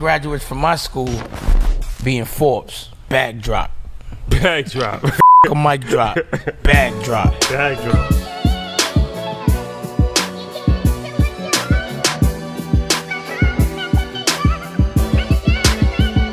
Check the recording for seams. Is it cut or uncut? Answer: uncut